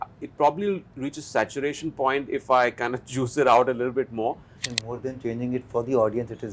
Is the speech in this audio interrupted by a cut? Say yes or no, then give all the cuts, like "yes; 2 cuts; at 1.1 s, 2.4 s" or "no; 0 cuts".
yes; 1 cut; at 4.5 s